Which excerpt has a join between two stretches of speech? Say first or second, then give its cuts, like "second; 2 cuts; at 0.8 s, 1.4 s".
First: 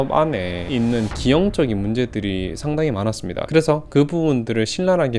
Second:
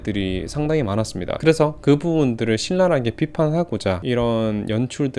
second; 1 cut; at 4.0 s